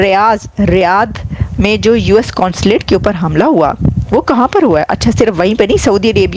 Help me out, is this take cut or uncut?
uncut